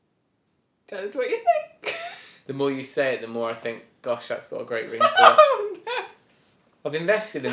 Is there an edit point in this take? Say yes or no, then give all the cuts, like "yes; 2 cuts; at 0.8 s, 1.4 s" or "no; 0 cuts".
no; 0 cuts